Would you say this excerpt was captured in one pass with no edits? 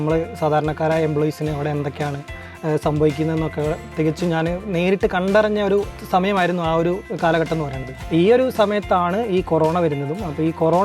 yes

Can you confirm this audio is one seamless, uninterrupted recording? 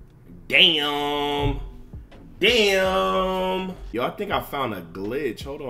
no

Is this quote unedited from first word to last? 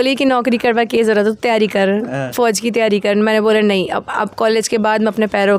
yes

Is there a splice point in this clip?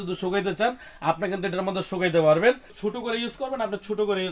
yes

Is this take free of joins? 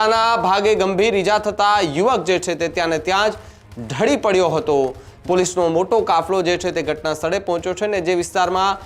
no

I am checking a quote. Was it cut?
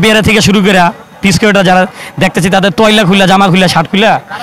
no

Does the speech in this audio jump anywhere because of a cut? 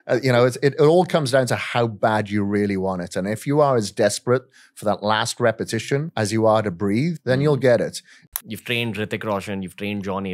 yes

